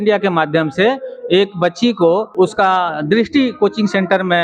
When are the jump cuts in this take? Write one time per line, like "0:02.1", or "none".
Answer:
0:02.3